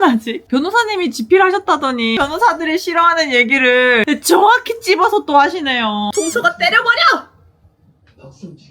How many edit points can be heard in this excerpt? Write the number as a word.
three